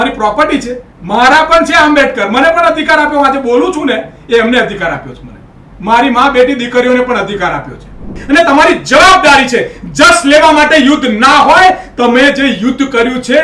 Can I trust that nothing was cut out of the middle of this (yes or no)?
no